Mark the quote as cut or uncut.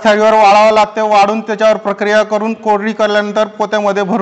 uncut